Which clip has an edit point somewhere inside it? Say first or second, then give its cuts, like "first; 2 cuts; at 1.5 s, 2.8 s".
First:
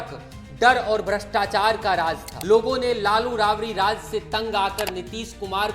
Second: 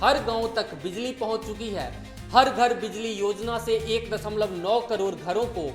first; 1 cut; at 2.3 s